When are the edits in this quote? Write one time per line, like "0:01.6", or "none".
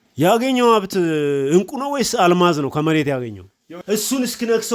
0:03.7